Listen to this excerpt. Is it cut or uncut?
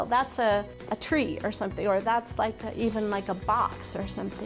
uncut